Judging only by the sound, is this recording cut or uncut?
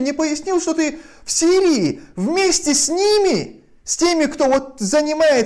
uncut